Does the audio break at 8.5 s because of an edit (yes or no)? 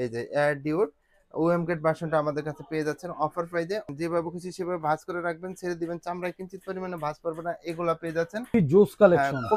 yes